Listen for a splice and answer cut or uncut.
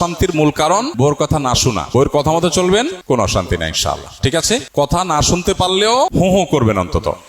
cut